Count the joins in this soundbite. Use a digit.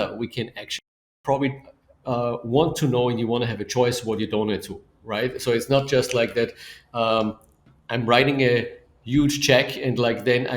1